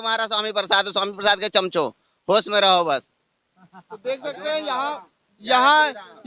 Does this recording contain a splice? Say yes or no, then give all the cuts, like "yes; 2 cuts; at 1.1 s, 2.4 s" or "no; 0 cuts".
no; 0 cuts